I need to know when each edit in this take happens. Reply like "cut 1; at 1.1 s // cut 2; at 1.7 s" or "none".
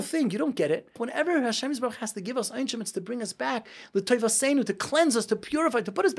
cut 1; at 1.0 s

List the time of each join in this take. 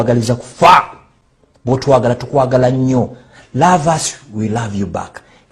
cut 1; at 1.0 s

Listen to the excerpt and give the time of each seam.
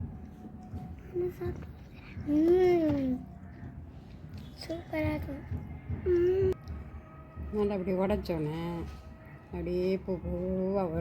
cut 1; at 6.5 s

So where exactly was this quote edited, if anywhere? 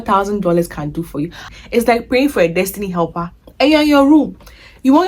cut 1; at 1.5 s

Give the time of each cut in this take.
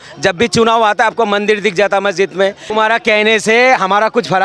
cut 1; at 2.7 s

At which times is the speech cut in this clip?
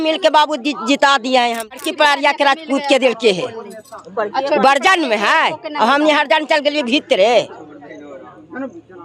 cut 1; at 1.7 s

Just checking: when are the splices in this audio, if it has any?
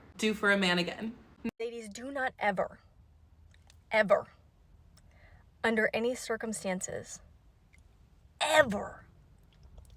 cut 1; at 1.5 s

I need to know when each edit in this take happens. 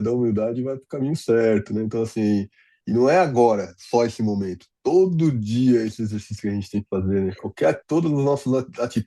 none

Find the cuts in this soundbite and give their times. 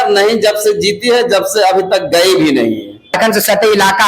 cut 1; at 3.2 s

